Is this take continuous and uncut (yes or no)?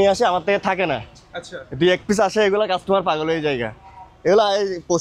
yes